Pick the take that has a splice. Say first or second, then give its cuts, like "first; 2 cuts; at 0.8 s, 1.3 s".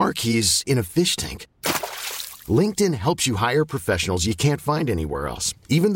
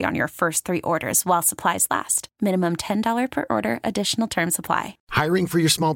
second; 1 cut; at 5.0 s